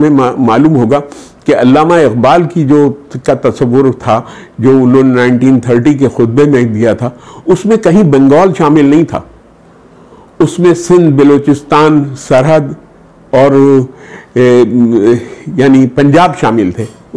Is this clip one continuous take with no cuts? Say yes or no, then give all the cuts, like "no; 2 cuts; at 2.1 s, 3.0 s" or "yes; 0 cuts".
yes; 0 cuts